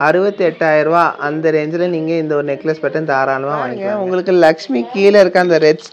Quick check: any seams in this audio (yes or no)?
yes